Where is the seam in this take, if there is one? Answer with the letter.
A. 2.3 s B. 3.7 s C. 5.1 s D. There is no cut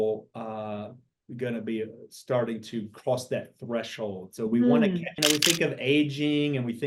C